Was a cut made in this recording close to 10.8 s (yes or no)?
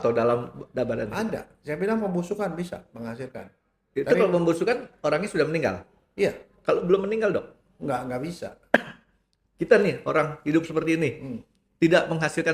no